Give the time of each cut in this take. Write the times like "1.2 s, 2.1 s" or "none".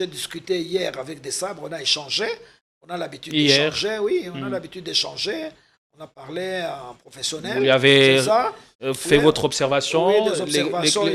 none